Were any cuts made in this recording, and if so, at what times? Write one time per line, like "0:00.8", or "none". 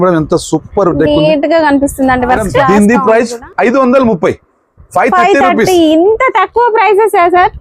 0:02.5